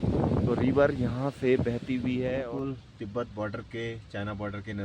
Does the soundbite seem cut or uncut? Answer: cut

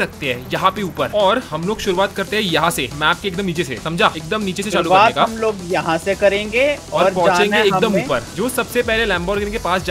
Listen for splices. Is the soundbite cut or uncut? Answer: cut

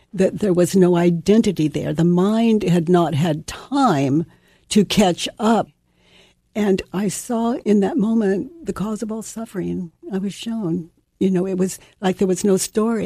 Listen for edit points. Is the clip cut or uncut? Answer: cut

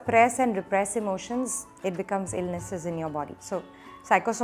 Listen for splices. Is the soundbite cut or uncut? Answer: uncut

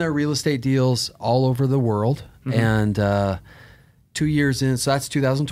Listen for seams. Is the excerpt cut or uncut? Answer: uncut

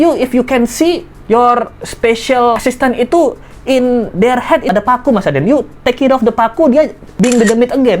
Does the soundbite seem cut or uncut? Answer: cut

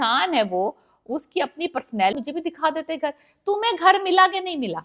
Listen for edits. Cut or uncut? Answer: cut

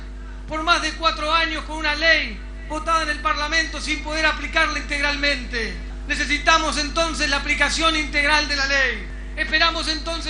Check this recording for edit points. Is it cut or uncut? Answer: uncut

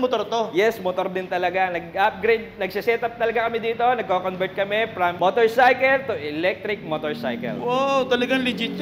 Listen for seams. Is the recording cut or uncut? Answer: uncut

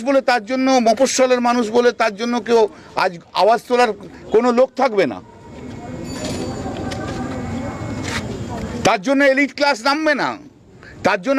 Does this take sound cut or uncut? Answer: uncut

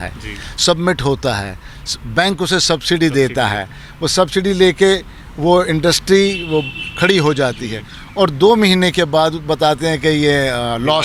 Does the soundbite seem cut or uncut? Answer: uncut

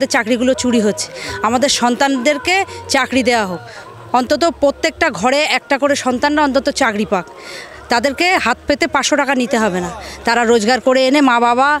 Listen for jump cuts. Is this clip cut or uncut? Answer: uncut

